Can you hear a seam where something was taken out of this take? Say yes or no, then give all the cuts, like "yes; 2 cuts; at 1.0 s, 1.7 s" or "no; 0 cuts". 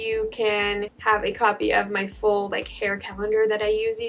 no; 0 cuts